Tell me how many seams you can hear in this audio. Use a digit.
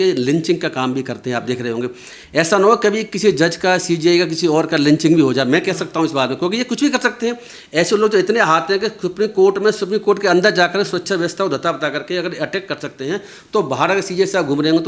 0